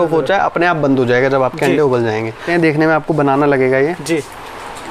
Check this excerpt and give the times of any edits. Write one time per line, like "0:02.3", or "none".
0:02.4